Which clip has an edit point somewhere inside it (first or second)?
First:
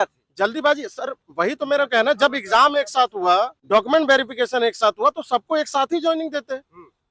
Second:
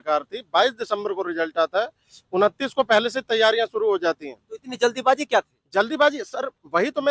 first